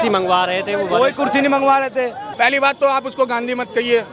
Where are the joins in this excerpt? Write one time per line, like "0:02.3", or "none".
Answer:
0:02.2